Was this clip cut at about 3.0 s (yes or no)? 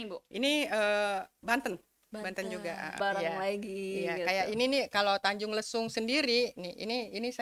yes